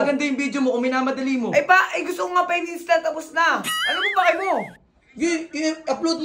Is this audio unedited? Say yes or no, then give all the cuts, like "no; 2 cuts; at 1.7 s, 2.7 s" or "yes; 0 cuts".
yes; 0 cuts